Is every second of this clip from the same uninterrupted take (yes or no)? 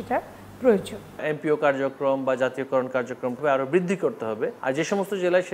no